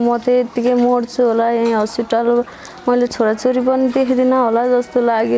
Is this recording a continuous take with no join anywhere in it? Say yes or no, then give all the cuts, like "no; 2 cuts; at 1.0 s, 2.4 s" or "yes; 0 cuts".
yes; 0 cuts